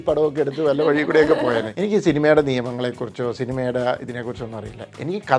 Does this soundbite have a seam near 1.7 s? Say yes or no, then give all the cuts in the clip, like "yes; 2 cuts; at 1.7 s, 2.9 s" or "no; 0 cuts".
yes; 1 cut; at 1.7 s